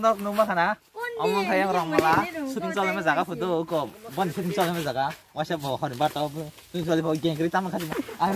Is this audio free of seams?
yes; 0 cuts

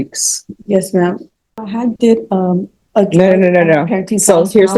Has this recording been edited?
yes; 1 cut; at 1.6 s

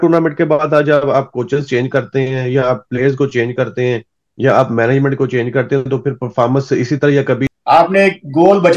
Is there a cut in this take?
yes; 1 cut; at 7.4 s

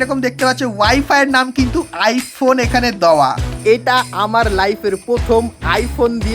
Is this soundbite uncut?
no; 1 cut; at 3.4 s

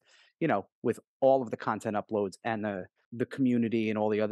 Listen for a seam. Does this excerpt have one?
yes; 1 cut; at 3.0 s

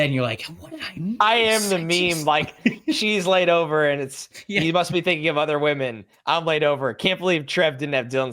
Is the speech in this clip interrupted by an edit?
no; 0 cuts

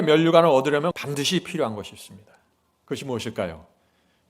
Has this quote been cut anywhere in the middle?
yes; 1 cut; at 1.0 s

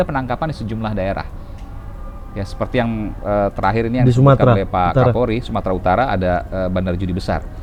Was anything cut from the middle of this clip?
no; 0 cuts

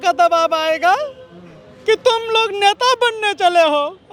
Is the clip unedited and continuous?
yes; 0 cuts

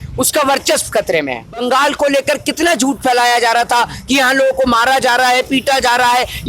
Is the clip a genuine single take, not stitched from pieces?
no; 1 cut; at 1.6 s

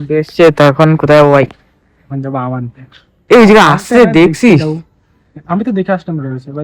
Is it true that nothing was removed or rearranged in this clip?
yes; 0 cuts

